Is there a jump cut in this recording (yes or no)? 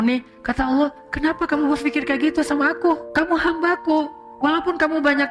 yes